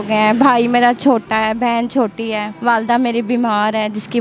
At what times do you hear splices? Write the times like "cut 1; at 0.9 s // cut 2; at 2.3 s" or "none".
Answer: cut 1; at 2.5 s